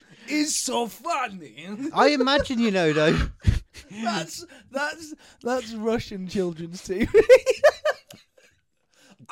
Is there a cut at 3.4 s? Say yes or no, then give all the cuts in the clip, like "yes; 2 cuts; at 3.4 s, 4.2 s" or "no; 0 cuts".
no; 0 cuts